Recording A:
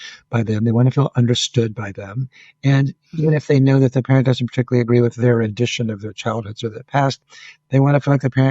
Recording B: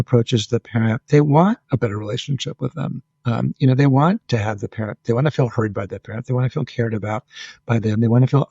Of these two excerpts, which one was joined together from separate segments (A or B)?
B